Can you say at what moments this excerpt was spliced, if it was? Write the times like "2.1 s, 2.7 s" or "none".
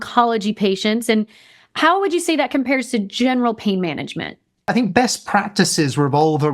4.7 s